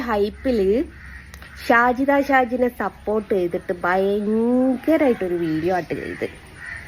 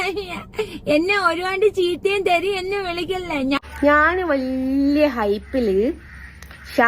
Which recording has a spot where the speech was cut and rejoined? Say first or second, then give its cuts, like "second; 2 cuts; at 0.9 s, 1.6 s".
second; 1 cut; at 3.6 s